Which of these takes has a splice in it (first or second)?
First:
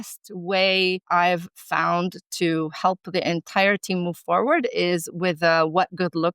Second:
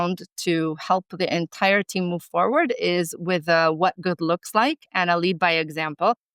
first